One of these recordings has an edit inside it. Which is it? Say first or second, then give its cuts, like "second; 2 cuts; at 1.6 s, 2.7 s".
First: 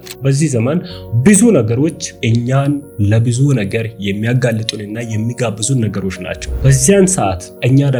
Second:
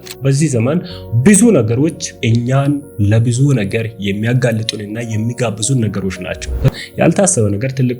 second; 1 cut; at 6.7 s